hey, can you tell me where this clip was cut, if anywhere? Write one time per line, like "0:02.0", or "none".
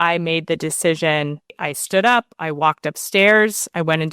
0:01.5